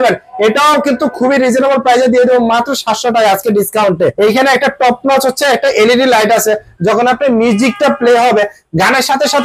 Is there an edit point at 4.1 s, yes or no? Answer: yes